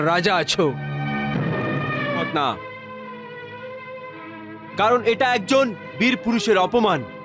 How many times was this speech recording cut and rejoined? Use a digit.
1